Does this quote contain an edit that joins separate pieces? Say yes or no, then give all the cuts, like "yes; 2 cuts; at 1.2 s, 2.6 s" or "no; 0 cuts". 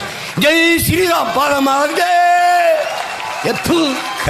no; 0 cuts